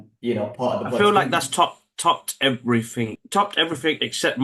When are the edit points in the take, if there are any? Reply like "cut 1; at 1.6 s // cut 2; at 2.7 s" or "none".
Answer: cut 1; at 3.2 s